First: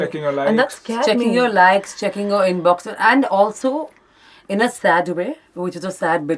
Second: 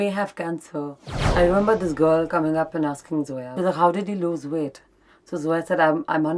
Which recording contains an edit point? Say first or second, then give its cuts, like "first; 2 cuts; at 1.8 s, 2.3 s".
second; 2 cuts; at 1.2 s, 3.4 s